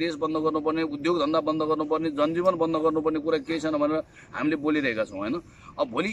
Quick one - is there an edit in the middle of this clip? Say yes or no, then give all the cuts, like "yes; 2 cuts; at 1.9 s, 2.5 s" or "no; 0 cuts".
no; 0 cuts